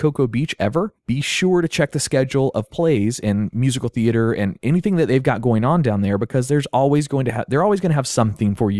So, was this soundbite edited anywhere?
yes; 1 cut; at 3.7 s

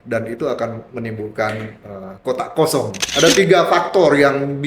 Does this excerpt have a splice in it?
yes; 1 cut; at 2.9 s

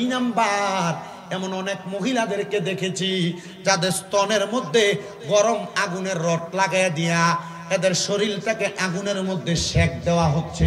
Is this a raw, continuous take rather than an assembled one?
yes; 0 cuts

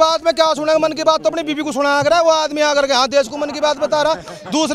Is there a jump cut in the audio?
no; 0 cuts

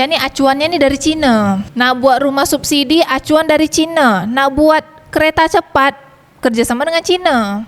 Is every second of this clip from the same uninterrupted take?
yes; 0 cuts

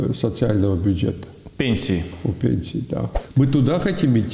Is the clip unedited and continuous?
no; 1 cut; at 3.2 s

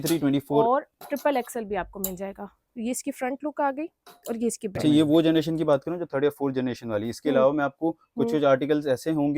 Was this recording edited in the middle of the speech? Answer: yes; 1 cut; at 4.8 s

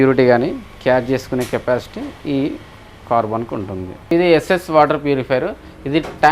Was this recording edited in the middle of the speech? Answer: yes; 1 cut; at 4.1 s

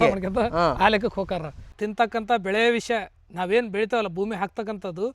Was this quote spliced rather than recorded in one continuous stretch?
yes; 1 cut; at 1.8 s

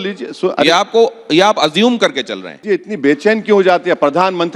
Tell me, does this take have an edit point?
yes; 1 cut; at 2.6 s

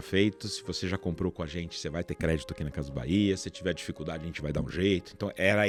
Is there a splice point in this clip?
no; 0 cuts

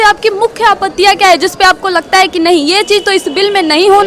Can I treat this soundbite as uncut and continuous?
yes; 0 cuts

